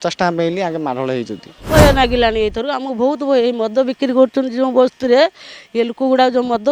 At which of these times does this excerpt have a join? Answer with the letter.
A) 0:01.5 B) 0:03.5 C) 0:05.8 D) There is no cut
A